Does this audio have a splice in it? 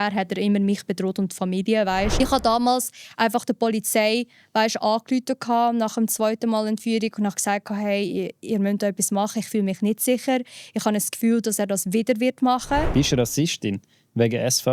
yes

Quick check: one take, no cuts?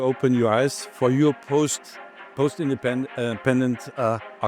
no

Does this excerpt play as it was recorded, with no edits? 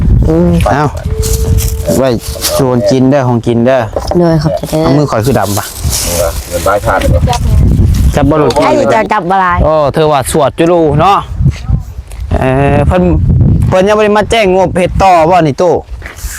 no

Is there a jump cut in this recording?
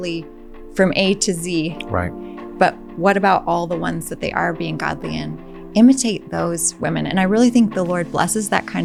no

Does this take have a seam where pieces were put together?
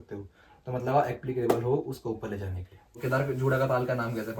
yes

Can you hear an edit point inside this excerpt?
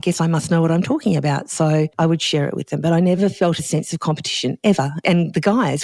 yes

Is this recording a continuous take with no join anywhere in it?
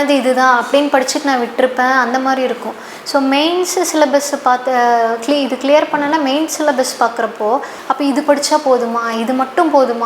no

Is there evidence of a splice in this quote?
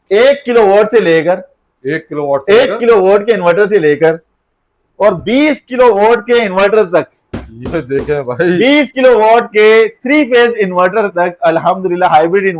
no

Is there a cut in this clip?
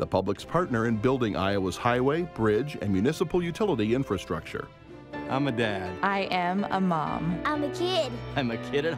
no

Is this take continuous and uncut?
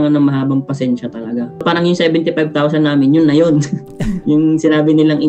no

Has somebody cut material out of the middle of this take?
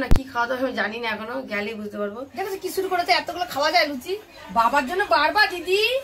yes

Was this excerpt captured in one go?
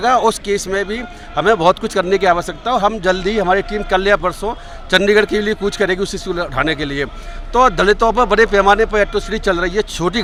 yes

